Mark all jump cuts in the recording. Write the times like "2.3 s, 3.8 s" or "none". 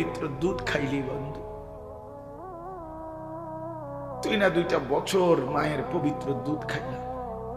none